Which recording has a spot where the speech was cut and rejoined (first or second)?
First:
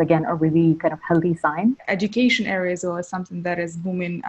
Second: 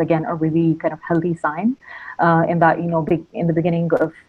first